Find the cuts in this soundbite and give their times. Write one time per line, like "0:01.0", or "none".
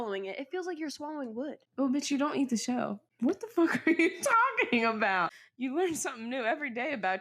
0:05.3